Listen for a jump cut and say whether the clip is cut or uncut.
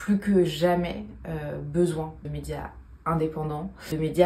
uncut